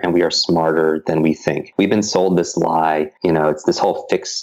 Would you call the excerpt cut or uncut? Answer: cut